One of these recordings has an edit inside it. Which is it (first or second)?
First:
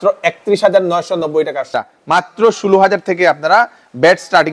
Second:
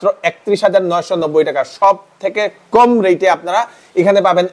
first